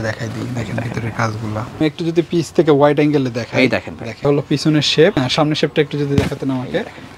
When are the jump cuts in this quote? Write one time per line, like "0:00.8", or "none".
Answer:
0:01.7